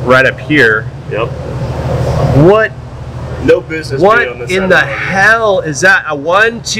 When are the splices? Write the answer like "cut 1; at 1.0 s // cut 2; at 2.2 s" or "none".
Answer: none